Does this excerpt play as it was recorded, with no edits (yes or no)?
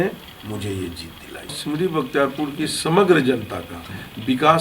no